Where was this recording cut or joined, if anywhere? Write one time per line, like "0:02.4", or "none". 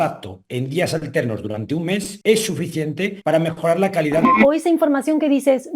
0:02.1
0:03.1
0:04.3